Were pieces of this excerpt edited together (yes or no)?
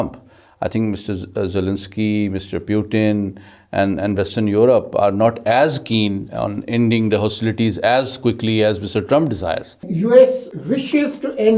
yes